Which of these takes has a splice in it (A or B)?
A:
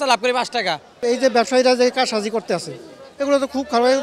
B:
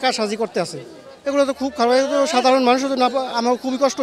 A